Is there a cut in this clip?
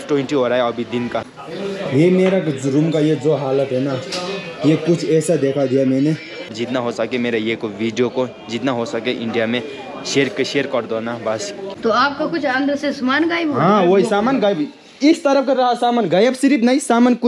yes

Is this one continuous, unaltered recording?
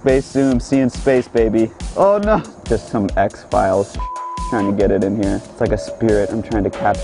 no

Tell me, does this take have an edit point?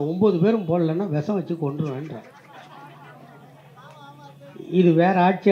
no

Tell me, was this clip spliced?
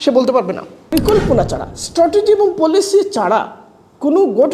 yes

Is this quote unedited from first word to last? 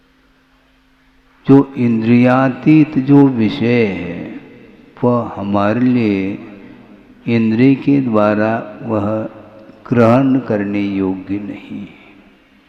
yes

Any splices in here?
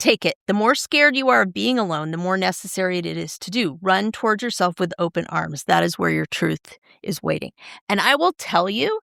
no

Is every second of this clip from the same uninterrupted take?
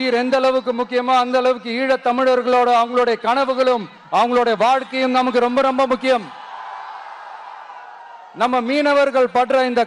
yes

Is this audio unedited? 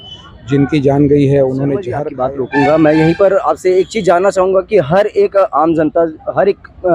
no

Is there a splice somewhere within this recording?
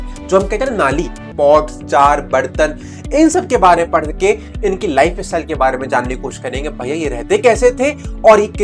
yes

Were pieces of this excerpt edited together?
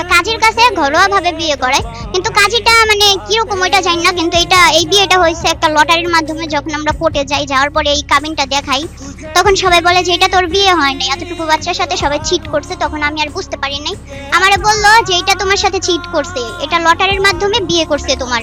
no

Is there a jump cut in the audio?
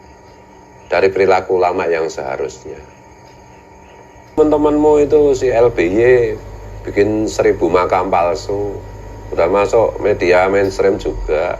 yes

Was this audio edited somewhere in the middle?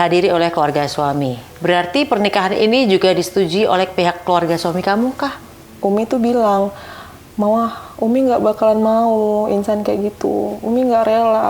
yes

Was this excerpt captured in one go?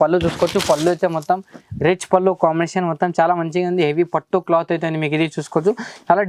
yes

